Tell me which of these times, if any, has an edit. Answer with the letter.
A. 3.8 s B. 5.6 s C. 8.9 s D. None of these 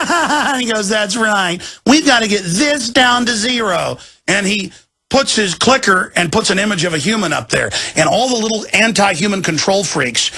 B